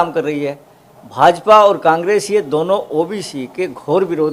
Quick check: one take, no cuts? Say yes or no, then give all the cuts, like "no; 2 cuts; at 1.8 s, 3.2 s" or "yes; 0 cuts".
yes; 0 cuts